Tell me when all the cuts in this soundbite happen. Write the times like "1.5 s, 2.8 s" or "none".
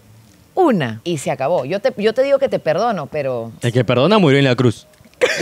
0.9 s, 3.6 s